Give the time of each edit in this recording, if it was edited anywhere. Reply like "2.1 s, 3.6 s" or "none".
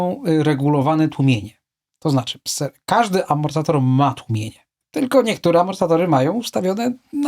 none